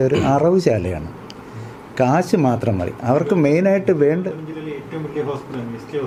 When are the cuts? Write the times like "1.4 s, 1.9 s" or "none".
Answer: none

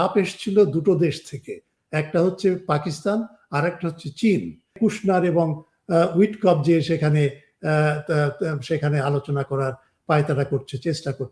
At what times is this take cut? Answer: 4.8 s

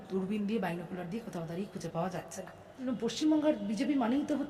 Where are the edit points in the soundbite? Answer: 2.9 s

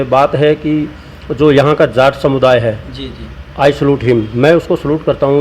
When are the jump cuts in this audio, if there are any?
none

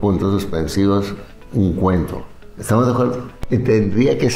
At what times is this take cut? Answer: 3.3 s

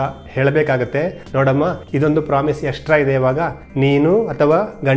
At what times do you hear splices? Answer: 1.5 s, 3.6 s

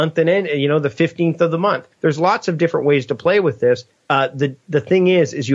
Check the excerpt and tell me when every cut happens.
1.9 s, 3.9 s

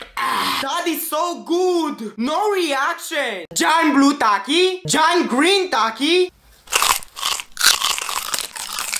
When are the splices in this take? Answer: 3.4 s

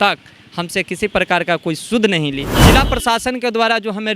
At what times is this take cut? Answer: 2.7 s

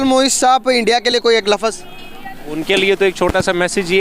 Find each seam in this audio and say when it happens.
2.6 s

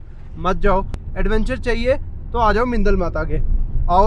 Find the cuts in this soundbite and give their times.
1.0 s

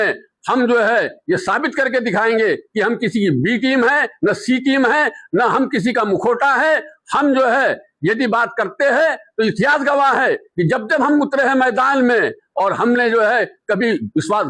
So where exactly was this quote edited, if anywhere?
none

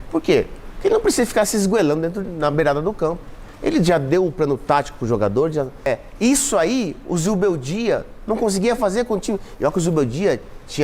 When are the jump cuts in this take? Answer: 5.9 s

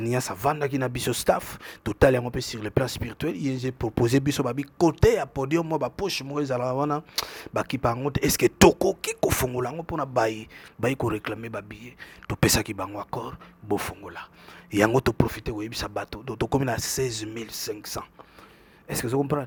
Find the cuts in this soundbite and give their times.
none

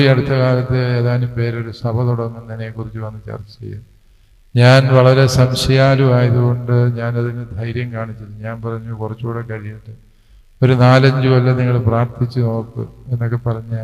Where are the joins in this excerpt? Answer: none

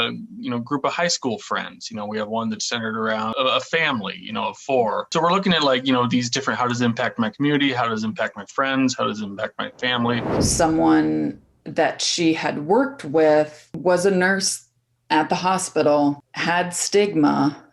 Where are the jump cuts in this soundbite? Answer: 3.3 s, 5.1 s, 10.3 s

